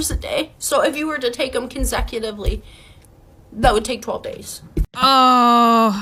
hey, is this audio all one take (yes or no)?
yes